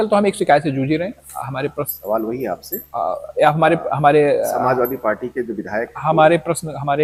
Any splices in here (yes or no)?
no